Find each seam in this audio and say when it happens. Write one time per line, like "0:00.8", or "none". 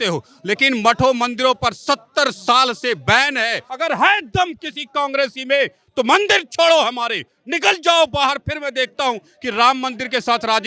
0:03.6